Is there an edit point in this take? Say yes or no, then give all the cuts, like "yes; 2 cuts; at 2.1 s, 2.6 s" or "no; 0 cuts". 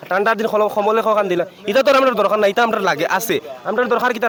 no; 0 cuts